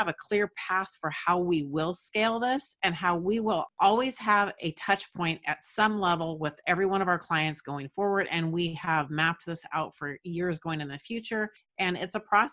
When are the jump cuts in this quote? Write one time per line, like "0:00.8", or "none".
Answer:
0:03.7
0:11.6